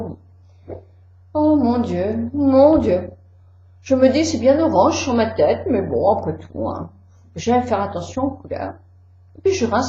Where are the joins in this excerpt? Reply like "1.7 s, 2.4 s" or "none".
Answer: 4.1 s